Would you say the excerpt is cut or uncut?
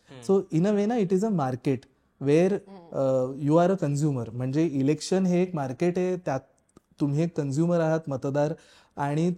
uncut